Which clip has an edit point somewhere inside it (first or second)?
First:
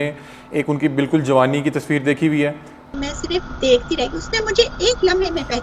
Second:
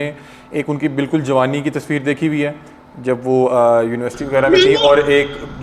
first